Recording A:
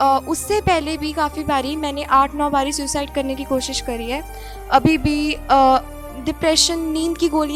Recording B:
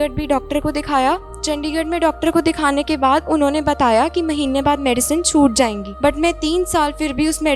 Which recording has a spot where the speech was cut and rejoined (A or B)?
B